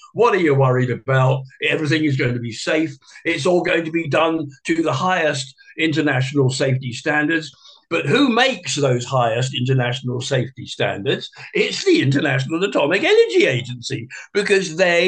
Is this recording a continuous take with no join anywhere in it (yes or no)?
no